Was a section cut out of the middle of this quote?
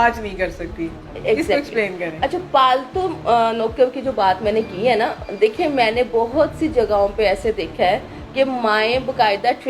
no; 0 cuts

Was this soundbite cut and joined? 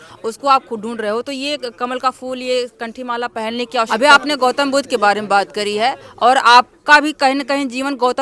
yes; 1 cut; at 3.9 s

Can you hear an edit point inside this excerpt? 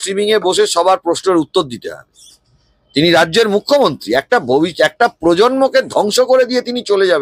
no; 0 cuts

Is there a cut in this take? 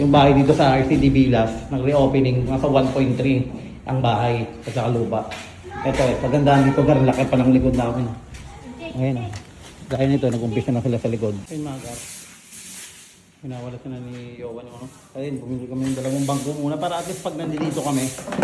yes; 1 cut; at 11.5 s

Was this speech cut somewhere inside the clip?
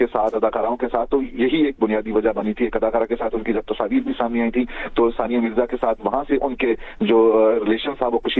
no; 0 cuts

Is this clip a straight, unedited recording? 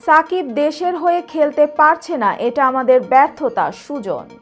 yes; 0 cuts

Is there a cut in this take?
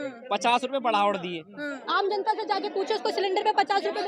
yes; 1 cut; at 1.8 s

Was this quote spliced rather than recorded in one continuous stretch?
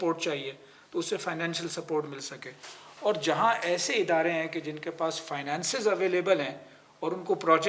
no; 0 cuts

